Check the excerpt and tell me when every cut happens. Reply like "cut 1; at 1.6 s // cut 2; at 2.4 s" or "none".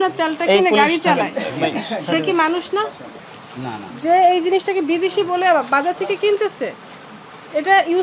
none